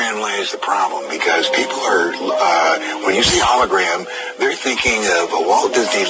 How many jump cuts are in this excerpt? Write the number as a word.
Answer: one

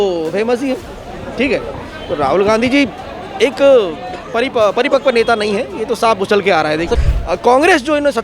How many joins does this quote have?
one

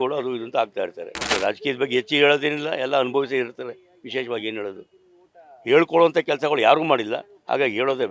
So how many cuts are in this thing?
one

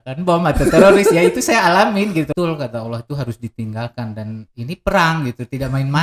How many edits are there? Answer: one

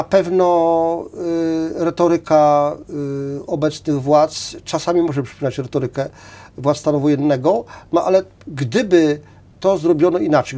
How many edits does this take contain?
zero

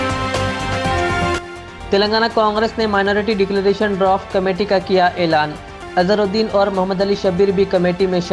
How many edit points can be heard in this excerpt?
one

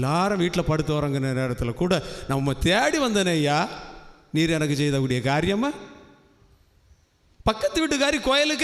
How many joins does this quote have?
zero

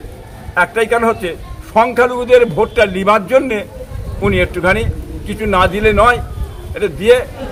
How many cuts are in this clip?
zero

